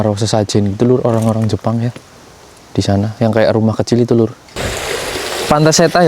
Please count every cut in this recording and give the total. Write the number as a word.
one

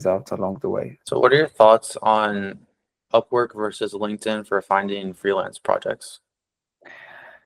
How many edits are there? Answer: one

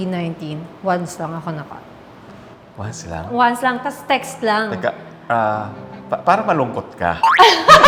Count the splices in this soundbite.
zero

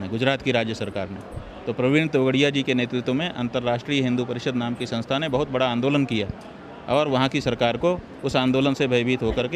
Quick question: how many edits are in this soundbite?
zero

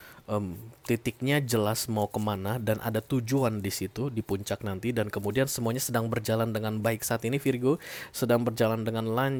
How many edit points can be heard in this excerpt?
zero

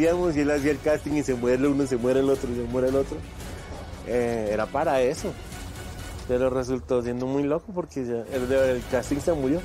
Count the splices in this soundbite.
zero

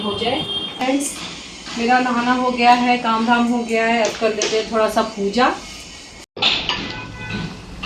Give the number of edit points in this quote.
two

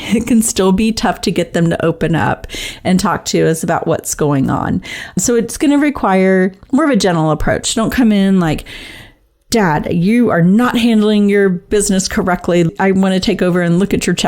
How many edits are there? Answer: two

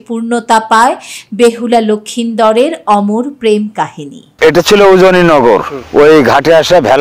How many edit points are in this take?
two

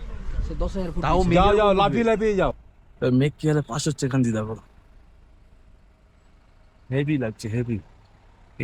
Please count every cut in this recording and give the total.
one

